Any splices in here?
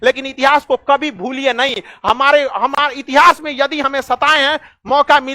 no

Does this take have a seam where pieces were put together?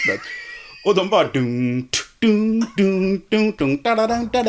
no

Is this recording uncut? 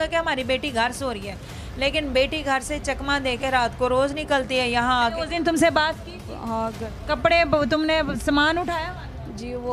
no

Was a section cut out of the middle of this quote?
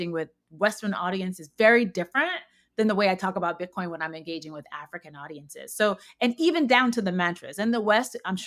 no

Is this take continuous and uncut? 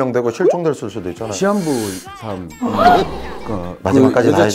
no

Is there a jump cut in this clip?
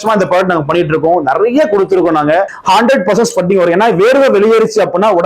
yes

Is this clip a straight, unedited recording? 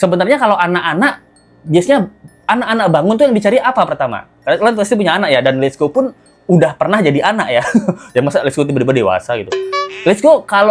yes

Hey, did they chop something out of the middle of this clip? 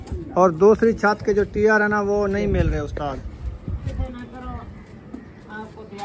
yes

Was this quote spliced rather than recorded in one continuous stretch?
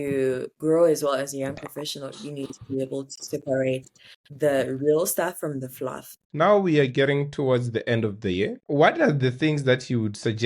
yes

